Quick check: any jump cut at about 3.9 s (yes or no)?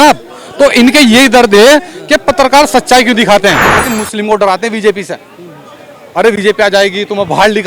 yes